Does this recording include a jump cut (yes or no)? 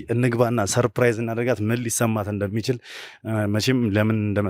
no